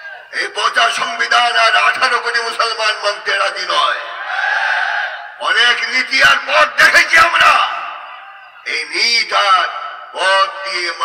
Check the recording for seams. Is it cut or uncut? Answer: uncut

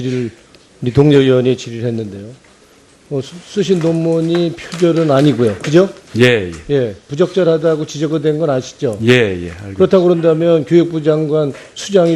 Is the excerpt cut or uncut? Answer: uncut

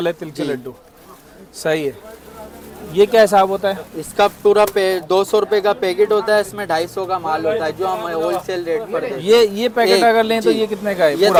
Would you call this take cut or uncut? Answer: uncut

